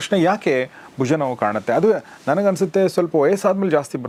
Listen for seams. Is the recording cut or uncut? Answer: uncut